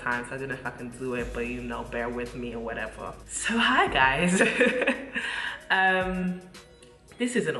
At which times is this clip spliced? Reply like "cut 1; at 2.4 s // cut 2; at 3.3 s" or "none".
cut 1; at 3.2 s